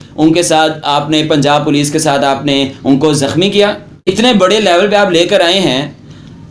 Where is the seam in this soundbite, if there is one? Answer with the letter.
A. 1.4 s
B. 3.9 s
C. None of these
B